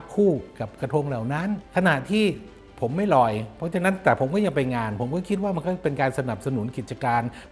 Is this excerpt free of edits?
yes; 0 cuts

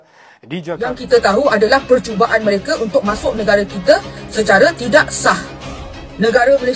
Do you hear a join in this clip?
yes; 1 cut; at 1.0 s

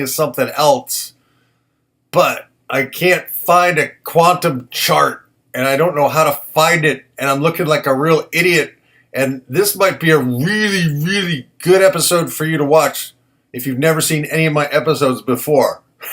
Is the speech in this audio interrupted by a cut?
no; 0 cuts

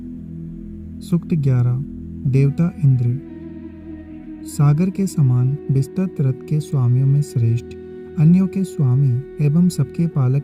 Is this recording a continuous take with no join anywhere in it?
no; 3 cuts; at 1.1 s, 3.1 s, 4.4 s

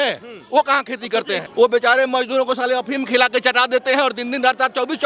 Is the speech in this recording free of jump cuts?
no; 1 cut; at 1.4 s

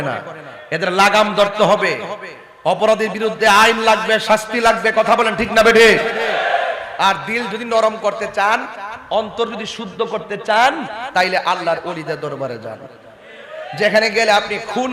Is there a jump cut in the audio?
no; 0 cuts

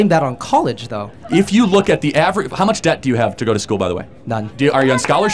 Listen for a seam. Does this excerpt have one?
yes; 2 cuts; at 1.1 s, 4.4 s

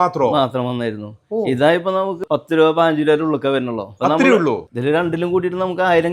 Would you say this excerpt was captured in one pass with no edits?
no; 2 cuts; at 2.2 s, 4.6 s

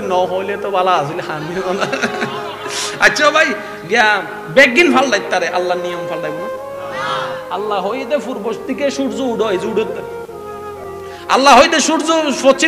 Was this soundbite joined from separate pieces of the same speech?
no; 0 cuts

